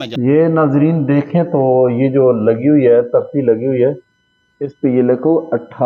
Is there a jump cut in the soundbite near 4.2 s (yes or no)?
no